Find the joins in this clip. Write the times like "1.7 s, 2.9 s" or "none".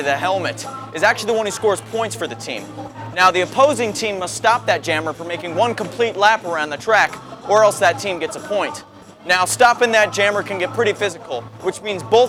none